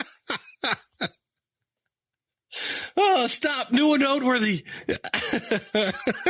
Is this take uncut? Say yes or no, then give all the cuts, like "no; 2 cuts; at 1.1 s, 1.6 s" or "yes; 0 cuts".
yes; 0 cuts